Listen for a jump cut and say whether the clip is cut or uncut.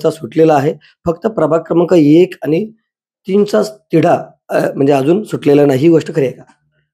uncut